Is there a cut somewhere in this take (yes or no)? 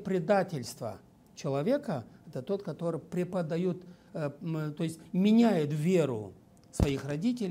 no